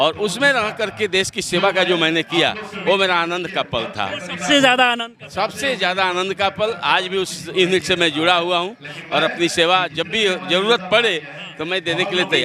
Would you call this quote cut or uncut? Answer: uncut